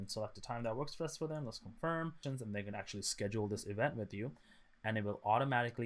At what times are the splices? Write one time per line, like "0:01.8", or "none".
0:02.2